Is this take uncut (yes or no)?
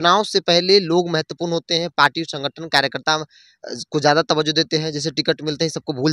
yes